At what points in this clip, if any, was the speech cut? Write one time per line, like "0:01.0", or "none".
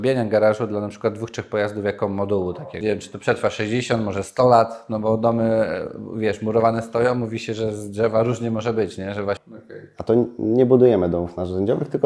0:02.8
0:09.5